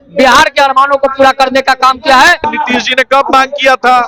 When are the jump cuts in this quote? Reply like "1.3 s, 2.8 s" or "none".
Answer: 2.5 s